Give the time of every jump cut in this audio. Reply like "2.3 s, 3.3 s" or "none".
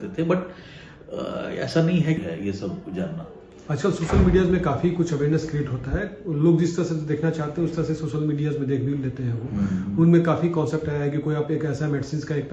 2.2 s